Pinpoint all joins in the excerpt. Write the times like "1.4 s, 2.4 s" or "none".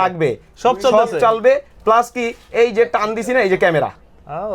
none